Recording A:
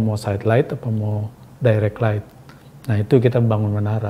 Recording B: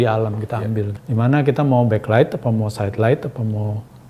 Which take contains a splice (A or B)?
B